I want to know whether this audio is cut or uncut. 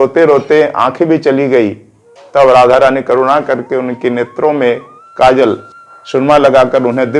cut